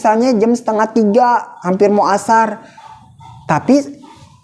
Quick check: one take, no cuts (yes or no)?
yes